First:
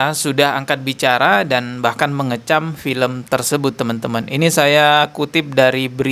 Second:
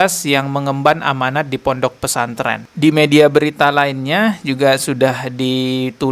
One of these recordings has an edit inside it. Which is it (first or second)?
second